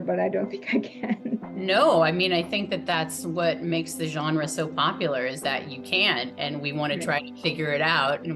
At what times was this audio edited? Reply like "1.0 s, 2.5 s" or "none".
1.5 s